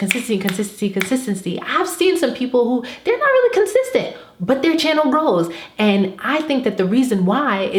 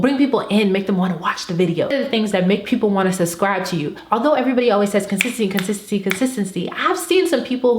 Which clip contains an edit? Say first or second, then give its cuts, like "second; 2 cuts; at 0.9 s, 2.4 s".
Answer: second; 2 cuts; at 1.9 s, 4.0 s